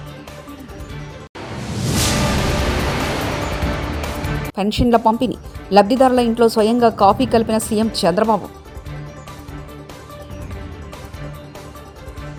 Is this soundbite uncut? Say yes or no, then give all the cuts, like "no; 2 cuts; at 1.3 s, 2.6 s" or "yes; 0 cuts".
yes; 0 cuts